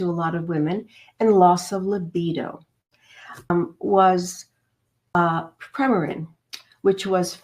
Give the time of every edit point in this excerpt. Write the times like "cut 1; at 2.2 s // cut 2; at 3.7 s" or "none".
cut 1; at 3.5 s // cut 2; at 5.1 s